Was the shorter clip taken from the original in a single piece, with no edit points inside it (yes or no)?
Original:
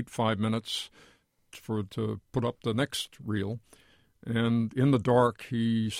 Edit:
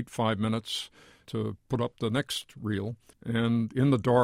no